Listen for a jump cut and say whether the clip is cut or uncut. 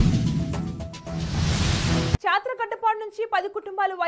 cut